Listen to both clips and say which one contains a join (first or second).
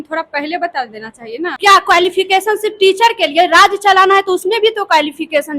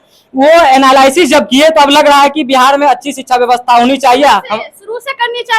first